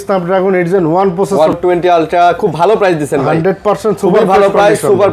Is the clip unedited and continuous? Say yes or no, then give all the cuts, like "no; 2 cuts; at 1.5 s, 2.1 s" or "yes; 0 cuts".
no; 1 cut; at 1.6 s